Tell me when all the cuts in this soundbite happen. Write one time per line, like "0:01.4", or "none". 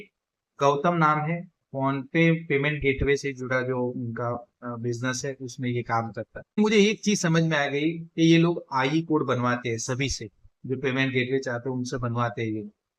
0:06.6